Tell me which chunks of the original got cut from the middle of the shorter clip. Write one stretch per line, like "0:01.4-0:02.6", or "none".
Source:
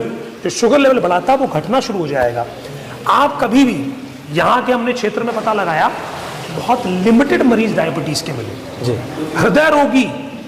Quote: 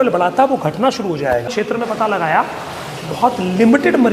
0:02.4-0:05.0